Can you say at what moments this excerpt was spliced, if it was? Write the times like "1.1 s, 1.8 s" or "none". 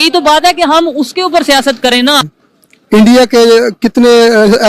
2.2 s

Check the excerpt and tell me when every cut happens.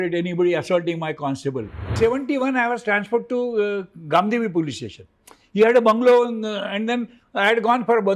1.9 s

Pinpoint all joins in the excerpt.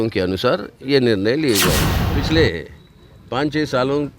1.9 s

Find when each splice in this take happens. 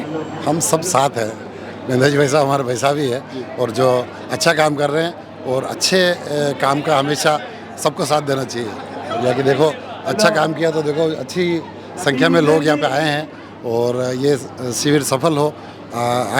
none

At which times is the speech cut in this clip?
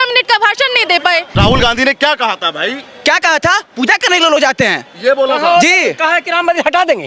1.3 s

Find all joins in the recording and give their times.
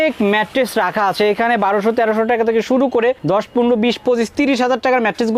none

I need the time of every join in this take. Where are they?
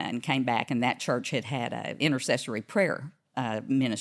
1.9 s

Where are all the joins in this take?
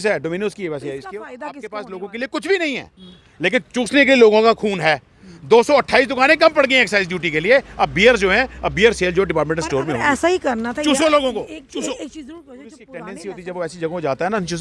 1.5 s, 12.9 s

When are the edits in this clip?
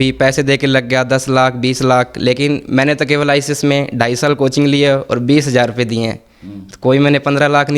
none

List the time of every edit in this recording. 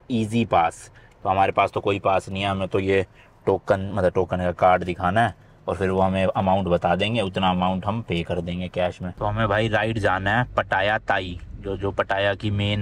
9.1 s

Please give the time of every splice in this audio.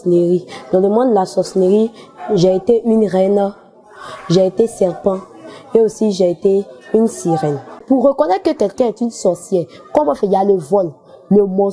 7.8 s

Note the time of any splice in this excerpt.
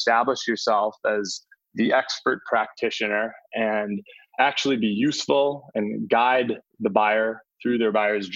4.2 s

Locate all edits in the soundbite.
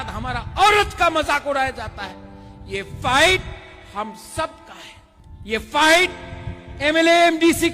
none

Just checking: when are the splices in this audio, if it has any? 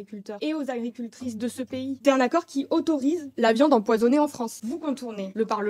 2.0 s, 4.5 s

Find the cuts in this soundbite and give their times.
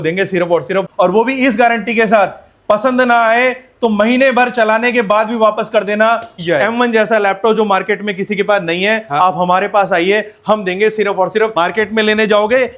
0.9 s, 6.3 s, 11.5 s

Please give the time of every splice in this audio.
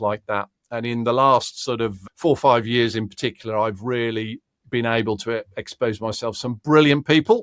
2.0 s

